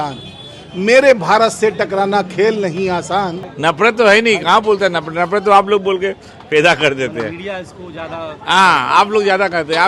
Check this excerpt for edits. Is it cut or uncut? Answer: cut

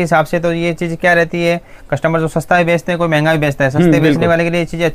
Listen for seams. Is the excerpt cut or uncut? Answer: uncut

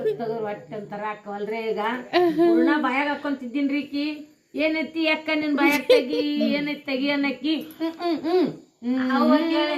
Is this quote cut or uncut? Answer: uncut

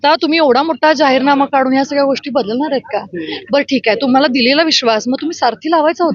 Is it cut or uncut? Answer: uncut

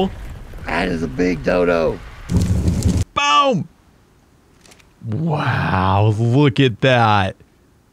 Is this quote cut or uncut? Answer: cut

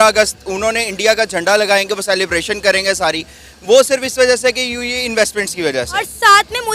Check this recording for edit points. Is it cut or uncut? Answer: uncut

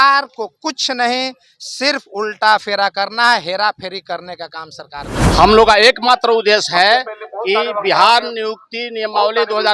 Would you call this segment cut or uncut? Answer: cut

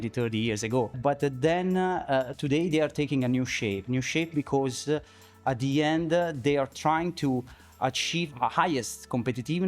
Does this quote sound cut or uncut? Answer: cut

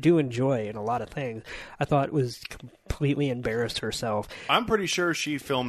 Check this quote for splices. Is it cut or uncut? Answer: uncut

